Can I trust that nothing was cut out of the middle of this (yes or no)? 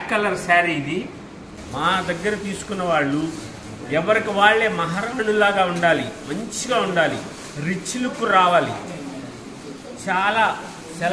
no